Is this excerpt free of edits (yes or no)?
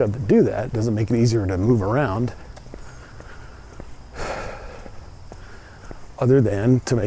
yes